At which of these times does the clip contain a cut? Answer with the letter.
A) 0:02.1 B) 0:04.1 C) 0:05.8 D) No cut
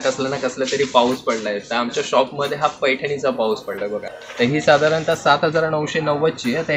B